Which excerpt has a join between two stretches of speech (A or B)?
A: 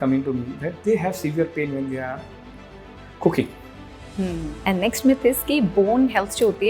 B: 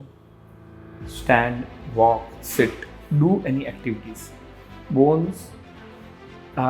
A